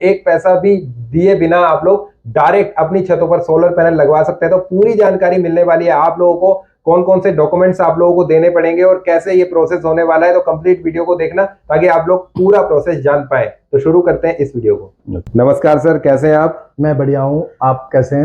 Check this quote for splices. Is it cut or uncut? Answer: uncut